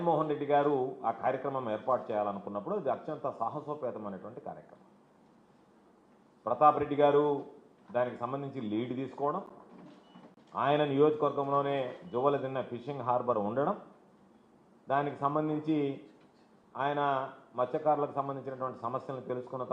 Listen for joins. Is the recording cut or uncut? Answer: cut